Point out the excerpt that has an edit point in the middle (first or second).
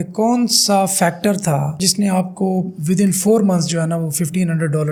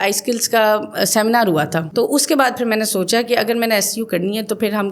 second